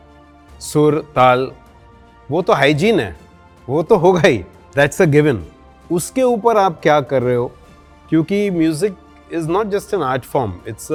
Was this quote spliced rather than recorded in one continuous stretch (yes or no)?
no